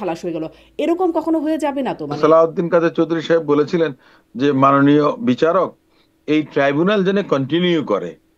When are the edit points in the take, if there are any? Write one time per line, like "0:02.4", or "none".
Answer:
0:02.2